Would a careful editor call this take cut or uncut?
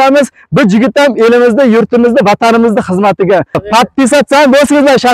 cut